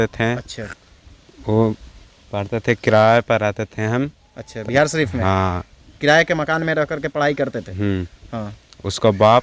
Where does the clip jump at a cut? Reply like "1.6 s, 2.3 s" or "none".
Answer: none